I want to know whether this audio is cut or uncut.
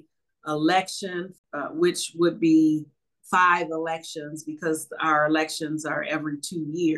cut